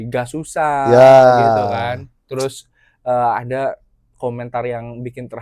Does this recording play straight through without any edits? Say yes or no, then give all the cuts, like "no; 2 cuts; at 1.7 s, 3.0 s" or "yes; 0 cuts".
yes; 0 cuts